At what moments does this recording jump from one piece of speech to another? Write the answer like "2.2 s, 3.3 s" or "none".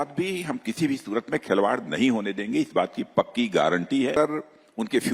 4.2 s